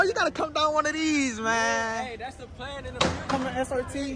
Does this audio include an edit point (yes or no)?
no